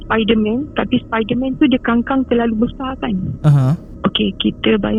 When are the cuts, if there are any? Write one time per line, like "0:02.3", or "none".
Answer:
none